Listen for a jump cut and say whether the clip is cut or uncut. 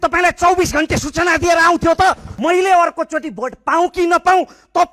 cut